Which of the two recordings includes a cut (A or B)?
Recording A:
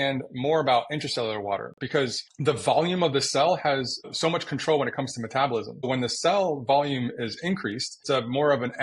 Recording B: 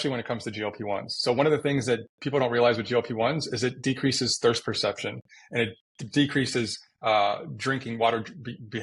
A